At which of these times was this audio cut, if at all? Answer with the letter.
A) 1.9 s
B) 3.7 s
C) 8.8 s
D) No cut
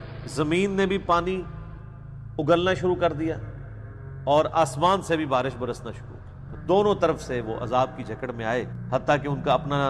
C